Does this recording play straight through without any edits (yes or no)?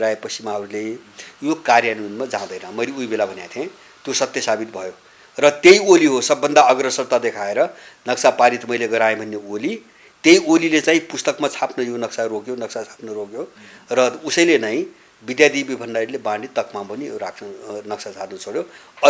yes